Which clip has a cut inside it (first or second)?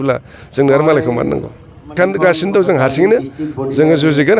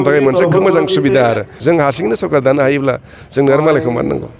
second